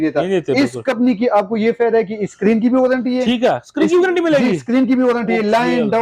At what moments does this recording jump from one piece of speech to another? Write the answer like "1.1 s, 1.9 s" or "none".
none